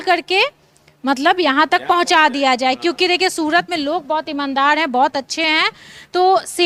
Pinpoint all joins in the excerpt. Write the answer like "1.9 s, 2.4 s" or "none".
none